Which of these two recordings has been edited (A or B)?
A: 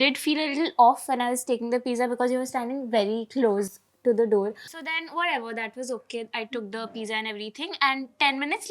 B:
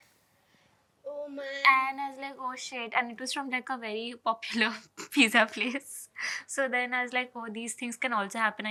A